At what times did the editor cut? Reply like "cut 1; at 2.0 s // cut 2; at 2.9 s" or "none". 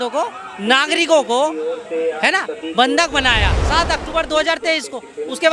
cut 1; at 3.5 s